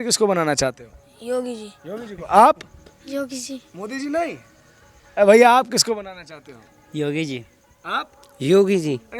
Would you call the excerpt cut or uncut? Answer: uncut